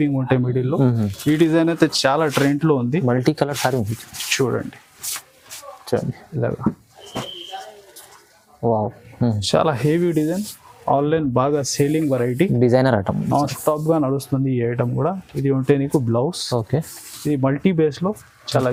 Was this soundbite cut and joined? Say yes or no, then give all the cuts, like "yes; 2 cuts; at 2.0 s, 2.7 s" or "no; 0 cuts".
no; 0 cuts